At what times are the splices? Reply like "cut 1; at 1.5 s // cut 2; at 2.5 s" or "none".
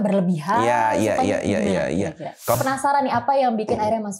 cut 1; at 2.6 s